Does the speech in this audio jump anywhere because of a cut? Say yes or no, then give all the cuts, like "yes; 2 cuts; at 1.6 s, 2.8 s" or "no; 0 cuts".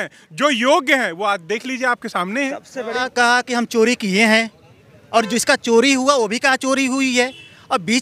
yes; 1 cut; at 3.0 s